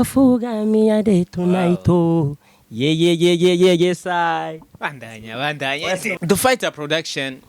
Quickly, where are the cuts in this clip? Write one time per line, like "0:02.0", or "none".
0:06.2